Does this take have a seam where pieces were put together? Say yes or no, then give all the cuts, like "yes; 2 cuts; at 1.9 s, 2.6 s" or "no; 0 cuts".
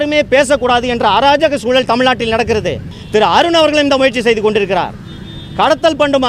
yes; 1 cut; at 2.9 s